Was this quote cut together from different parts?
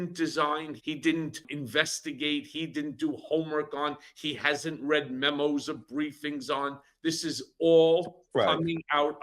yes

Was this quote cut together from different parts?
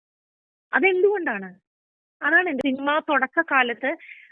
yes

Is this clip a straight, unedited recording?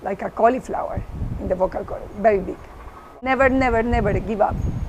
no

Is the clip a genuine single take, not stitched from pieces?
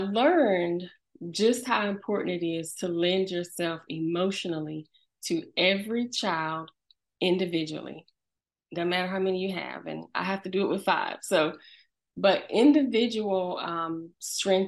no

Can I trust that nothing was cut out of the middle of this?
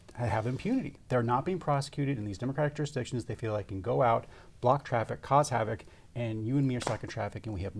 yes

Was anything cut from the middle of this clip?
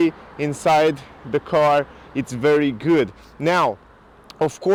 no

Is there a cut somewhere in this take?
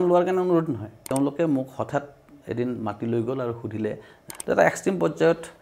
yes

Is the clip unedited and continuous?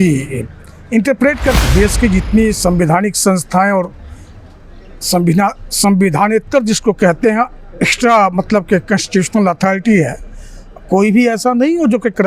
no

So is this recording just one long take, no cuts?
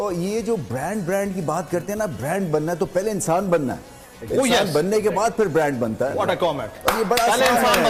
yes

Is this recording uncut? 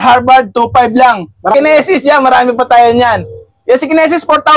no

